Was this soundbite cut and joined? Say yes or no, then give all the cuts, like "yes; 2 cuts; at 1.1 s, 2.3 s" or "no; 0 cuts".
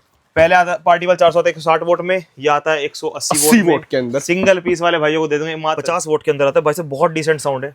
yes; 1 cut; at 5.8 s